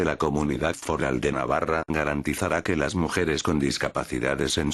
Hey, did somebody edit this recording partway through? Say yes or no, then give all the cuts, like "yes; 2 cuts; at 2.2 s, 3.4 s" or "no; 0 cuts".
yes; 2 cuts; at 1.3 s, 2.8 s